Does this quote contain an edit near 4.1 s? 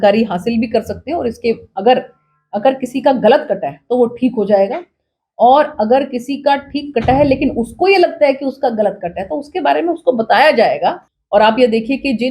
no; 1 cut; at 11.1 s

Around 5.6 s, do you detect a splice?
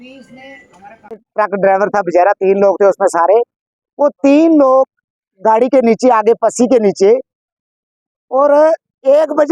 no; 1 cut; at 1.0 s

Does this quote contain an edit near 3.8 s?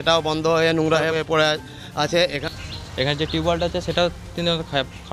no; 2 cuts; at 1.1 s, 2.4 s

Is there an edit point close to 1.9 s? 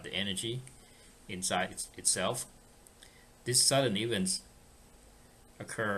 no; 1 cut; at 5.1 s

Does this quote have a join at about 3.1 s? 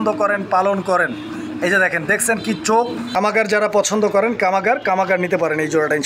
yes; 1 cut; at 3.1 s

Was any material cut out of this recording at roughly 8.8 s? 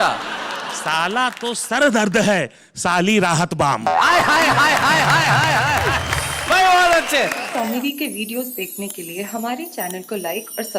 no; 1 cut; at 7.4 s

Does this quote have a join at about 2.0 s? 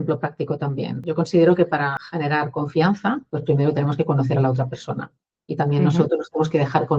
yes; 3 cuts; at 1.0 s, 2.0 s, 3.3 s

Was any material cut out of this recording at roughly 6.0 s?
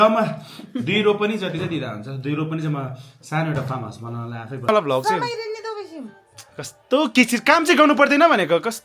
no; 1 cut; at 4.7 s

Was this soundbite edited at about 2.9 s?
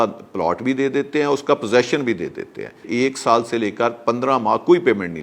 yes; 1 cut; at 2.9 s

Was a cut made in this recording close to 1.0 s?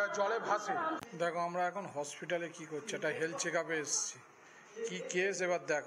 yes; 1 cut; at 1.0 s

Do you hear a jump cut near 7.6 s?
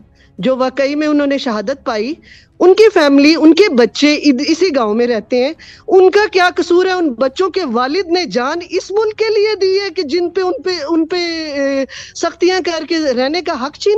no; 0 cuts

